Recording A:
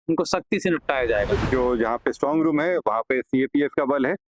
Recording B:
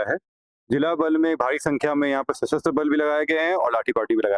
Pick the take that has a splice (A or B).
A